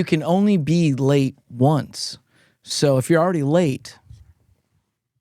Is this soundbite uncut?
yes; 0 cuts

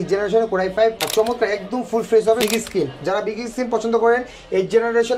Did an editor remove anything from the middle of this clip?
yes; 2 cuts; at 1.0 s, 2.4 s

